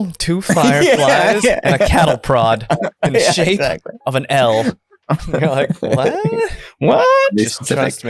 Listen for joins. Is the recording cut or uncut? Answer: uncut